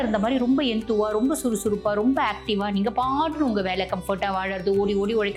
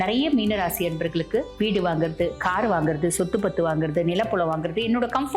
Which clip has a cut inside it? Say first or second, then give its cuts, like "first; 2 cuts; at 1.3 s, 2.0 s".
second; 1 cut; at 1.5 s